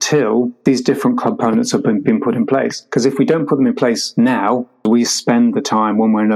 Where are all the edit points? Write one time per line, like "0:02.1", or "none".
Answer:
0:04.8